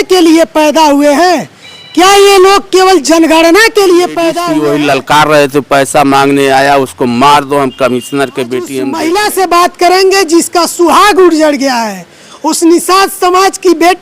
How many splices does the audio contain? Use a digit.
2